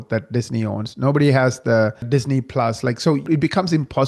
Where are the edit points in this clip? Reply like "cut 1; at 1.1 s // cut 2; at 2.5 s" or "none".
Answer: cut 1; at 2.0 s // cut 2; at 3.3 s